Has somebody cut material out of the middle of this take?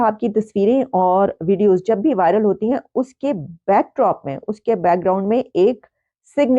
no; 0 cuts

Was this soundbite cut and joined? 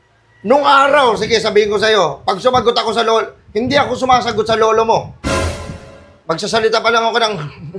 no; 0 cuts

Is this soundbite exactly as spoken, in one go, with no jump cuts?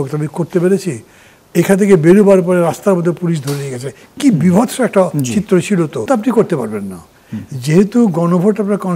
no; 1 cut; at 6.1 s

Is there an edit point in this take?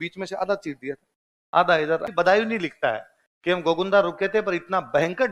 yes; 1 cut; at 2.0 s

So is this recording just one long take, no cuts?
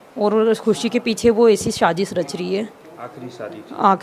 yes; 0 cuts

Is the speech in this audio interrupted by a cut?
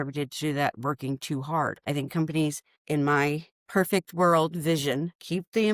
yes; 1 cut; at 1.8 s

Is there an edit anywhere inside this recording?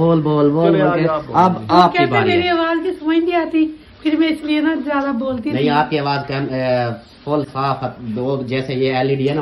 no; 0 cuts

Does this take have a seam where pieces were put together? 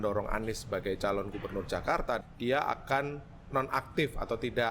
yes; 1 cut; at 2.2 s

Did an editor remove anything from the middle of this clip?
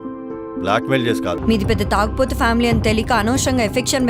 yes; 1 cut; at 1.4 s

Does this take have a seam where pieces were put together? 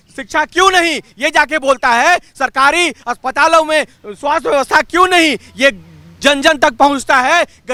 no; 0 cuts

